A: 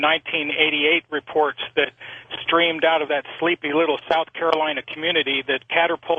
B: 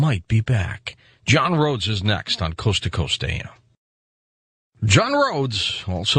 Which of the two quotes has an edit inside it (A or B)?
A